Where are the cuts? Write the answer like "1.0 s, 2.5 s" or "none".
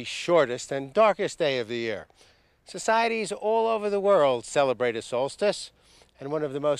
2.7 s